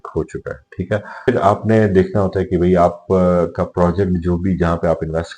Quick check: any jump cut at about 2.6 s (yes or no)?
no